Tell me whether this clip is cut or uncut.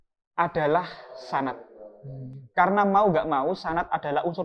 uncut